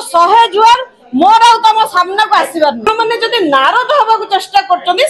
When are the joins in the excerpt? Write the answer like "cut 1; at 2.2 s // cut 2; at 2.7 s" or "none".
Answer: cut 1; at 2.9 s